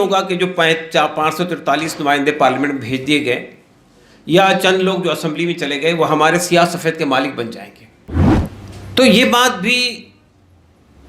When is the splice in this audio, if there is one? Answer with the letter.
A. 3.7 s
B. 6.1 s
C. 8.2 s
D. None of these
C